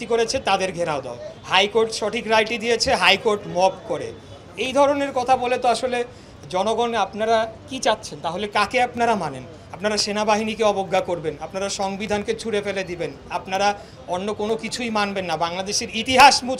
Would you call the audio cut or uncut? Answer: uncut